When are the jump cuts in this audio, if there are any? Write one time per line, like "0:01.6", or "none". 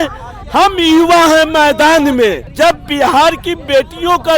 0:02.4